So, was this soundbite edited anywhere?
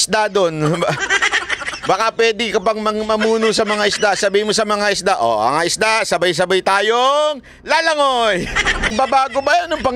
yes; 1 cut; at 8.9 s

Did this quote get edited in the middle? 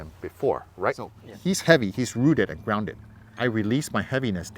yes; 1 cut; at 1.2 s

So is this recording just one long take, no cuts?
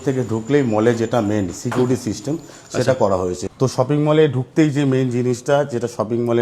yes; 0 cuts

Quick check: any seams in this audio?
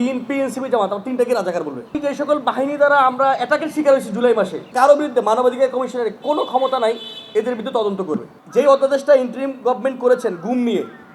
yes; 3 cuts; at 1.9 s, 4.7 s, 8.4 s

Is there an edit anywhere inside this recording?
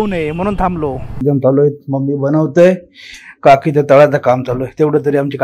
yes; 1 cut; at 1.2 s

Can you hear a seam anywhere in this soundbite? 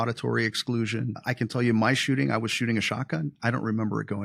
yes; 1 cut; at 1.2 s

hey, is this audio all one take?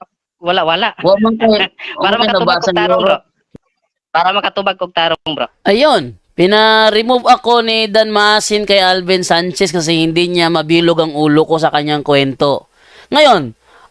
no; 1 cut; at 5.5 s

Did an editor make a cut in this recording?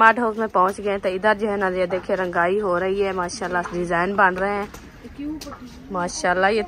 no; 0 cuts

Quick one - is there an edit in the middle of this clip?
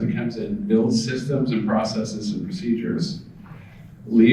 no; 0 cuts

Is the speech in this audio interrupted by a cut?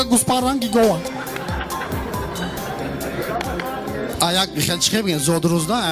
yes; 1 cut; at 2.6 s

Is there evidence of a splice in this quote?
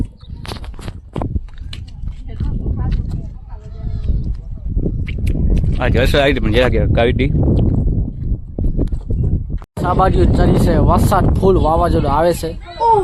yes; 1 cut; at 9.6 s

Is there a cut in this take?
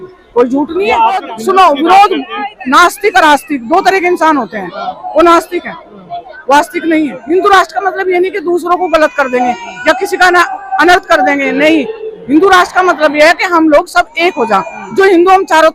yes; 2 cuts; at 1.3 s, 7.2 s

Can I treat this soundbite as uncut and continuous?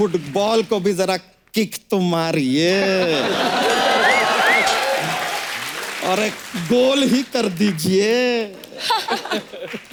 yes; 0 cuts

